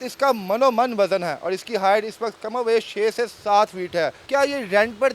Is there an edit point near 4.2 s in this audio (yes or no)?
yes